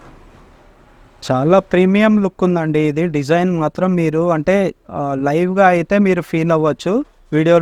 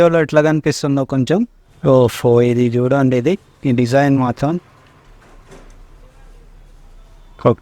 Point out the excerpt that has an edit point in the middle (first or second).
second